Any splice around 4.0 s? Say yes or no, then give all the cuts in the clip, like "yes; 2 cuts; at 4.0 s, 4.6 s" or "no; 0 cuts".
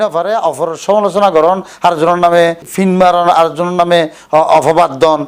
no; 1 cut; at 2.6 s